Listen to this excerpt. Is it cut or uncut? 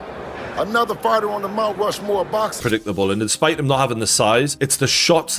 cut